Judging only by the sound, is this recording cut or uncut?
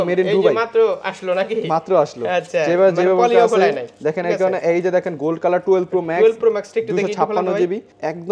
uncut